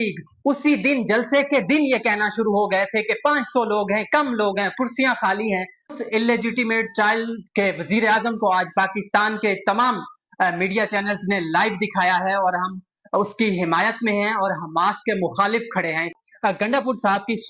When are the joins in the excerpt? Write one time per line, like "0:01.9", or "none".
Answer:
0:06.0
0:16.1